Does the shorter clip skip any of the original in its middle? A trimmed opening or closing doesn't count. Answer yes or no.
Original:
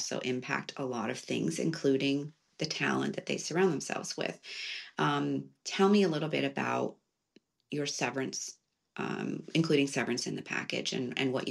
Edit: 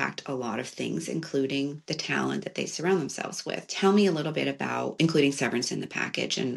yes